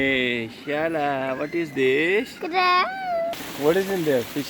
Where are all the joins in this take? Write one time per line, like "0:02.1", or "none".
0:03.4